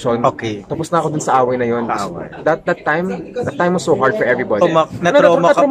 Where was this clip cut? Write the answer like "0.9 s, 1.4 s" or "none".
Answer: 4.6 s

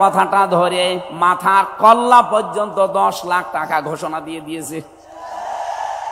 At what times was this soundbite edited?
none

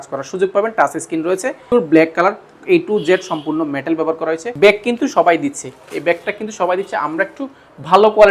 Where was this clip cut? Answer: 1.7 s, 4.5 s

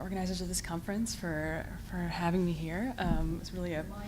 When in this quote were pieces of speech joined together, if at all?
2.4 s

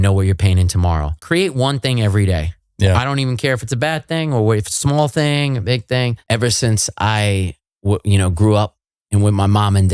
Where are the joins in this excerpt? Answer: 1.2 s, 6.2 s

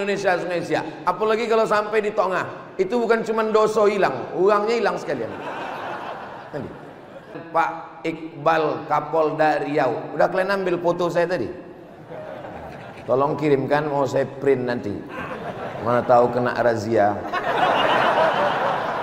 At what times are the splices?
7.4 s

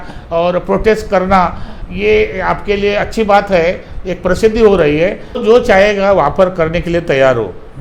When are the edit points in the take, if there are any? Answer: 5.4 s

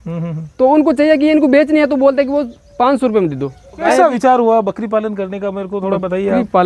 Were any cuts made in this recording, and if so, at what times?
3.8 s

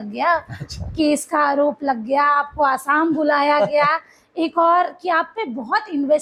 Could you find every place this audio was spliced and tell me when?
none

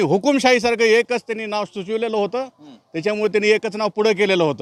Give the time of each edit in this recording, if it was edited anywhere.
none

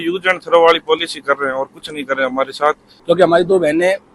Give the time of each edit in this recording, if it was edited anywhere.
2.9 s

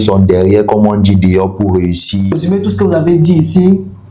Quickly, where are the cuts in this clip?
2.3 s

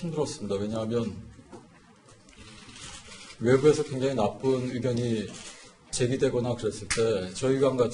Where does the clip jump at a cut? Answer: none

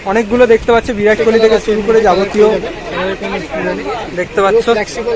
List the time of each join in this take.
2.5 s

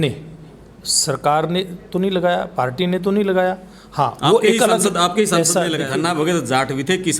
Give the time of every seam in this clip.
5.9 s

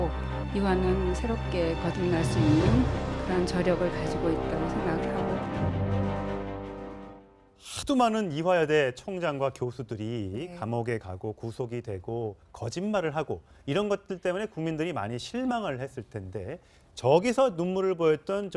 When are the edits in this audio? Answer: 5.5 s

